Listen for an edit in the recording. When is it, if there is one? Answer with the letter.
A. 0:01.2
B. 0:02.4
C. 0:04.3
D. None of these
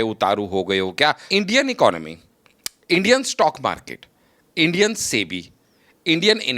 A